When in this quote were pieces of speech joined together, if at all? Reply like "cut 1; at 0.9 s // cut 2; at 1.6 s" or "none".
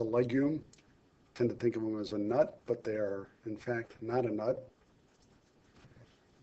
cut 1; at 2.7 s

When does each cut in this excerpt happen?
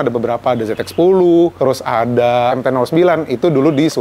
cut 1; at 1.5 s // cut 2; at 2.6 s

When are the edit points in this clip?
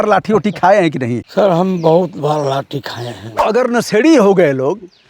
cut 1; at 1.2 s // cut 2; at 3.4 s

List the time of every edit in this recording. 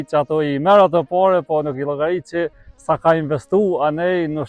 none

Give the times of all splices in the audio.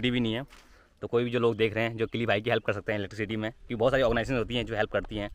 none

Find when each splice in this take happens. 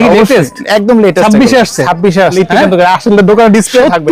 cut 1; at 2.3 s

